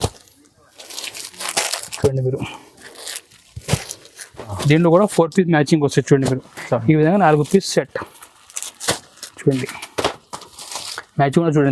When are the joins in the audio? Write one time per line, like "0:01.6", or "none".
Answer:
0:04.5